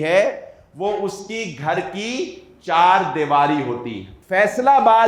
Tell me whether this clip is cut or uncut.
cut